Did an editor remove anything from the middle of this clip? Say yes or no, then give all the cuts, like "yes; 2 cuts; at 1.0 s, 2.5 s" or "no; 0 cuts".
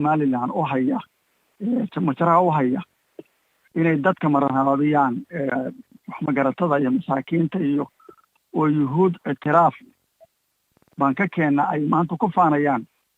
no; 0 cuts